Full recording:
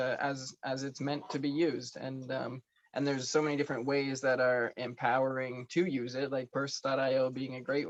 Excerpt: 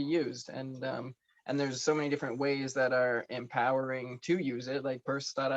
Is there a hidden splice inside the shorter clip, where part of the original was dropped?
no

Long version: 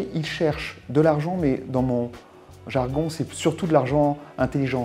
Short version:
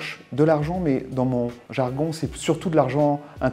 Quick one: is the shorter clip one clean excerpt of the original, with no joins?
no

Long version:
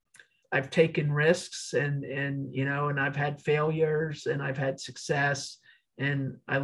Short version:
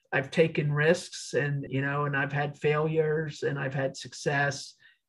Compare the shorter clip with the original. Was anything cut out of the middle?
yes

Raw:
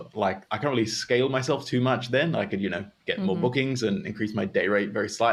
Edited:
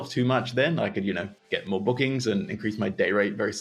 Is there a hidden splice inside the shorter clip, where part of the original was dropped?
no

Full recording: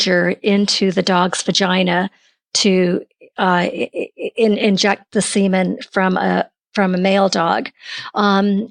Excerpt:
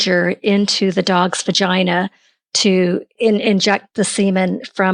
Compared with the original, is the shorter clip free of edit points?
no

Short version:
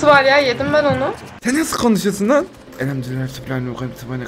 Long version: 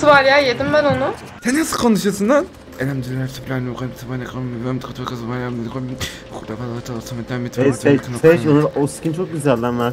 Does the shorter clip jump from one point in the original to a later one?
no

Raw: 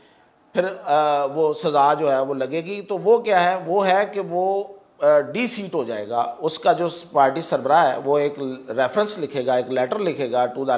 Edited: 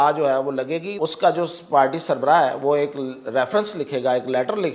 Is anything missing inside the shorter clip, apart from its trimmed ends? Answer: yes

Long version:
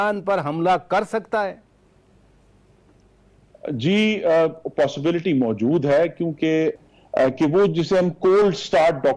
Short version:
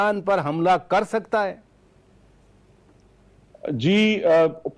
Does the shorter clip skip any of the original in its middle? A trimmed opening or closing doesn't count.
no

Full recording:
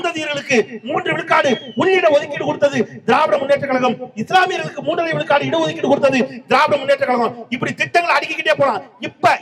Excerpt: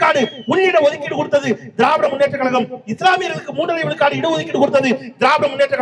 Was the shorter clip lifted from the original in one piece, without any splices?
yes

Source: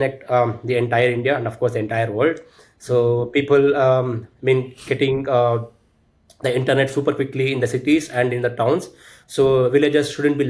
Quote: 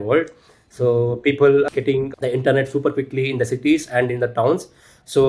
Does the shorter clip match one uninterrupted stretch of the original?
no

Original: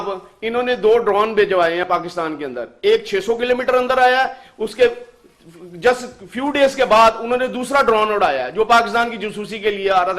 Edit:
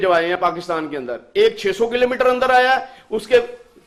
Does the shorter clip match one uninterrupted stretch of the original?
yes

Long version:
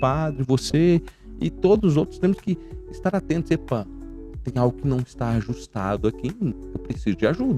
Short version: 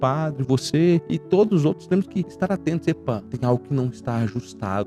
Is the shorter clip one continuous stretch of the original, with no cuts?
no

